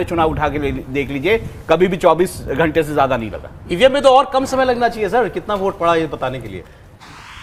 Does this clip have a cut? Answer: no; 0 cuts

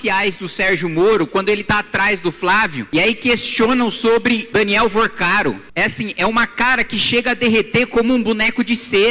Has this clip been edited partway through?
yes; 3 cuts; at 2.8 s, 4.4 s, 5.6 s

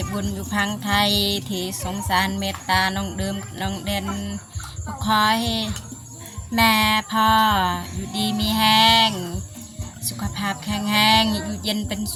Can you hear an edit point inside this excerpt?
no; 0 cuts

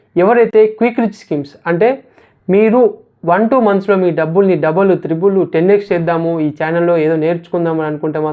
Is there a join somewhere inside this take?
no; 0 cuts

